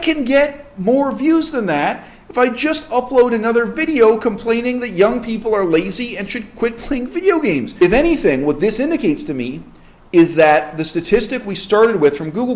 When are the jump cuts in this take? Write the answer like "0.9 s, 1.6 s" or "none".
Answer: 7.8 s